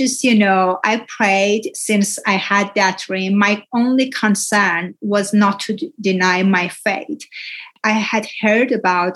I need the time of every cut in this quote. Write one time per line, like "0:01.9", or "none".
0:07.7